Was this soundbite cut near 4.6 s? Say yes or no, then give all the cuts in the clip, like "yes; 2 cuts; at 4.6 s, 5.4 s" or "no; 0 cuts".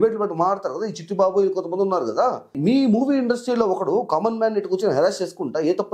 no; 1 cut; at 2.6 s